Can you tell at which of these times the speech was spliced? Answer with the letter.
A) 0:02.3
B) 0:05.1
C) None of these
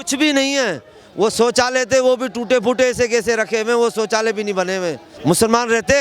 B